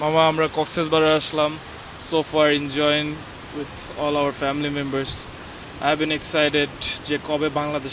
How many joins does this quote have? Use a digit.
0